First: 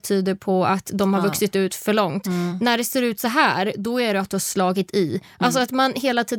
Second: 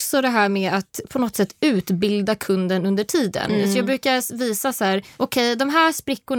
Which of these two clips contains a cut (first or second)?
second